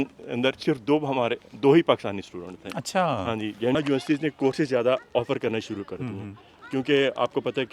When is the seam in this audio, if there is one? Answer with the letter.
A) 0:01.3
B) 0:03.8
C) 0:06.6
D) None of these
B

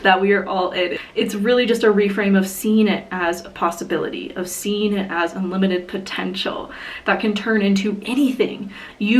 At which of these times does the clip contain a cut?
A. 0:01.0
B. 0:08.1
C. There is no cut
A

